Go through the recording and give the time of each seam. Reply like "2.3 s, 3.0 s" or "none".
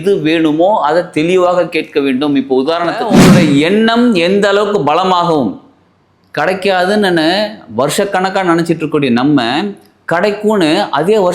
3.1 s